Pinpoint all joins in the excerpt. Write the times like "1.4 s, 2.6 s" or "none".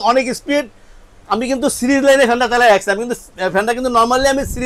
none